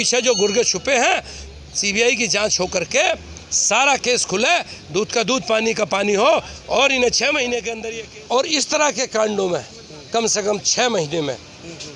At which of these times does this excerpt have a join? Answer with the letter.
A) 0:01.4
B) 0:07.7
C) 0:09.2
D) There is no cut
B